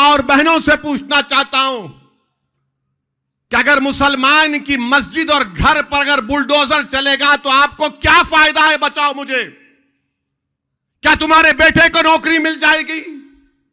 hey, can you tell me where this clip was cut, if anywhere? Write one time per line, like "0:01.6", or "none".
none